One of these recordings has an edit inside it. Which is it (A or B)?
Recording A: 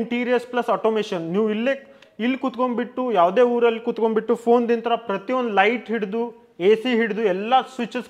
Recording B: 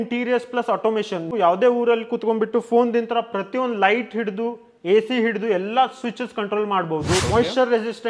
B